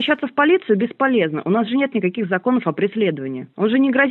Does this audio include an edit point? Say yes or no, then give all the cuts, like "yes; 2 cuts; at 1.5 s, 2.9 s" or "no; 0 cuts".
no; 0 cuts